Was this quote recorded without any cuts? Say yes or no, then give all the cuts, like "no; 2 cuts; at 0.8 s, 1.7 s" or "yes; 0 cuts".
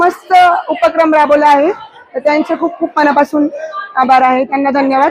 yes; 0 cuts